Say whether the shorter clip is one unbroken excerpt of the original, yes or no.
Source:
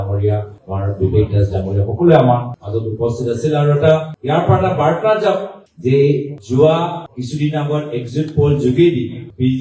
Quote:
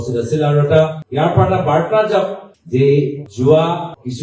yes